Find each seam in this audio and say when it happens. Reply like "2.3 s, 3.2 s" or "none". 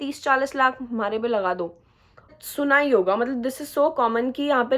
2.3 s